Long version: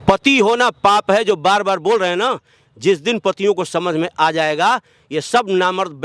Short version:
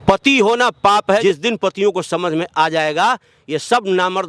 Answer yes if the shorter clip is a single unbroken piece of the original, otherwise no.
no